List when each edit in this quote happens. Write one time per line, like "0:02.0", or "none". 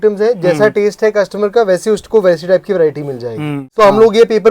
0:03.6